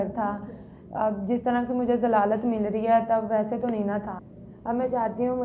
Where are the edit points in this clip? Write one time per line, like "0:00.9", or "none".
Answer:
0:04.2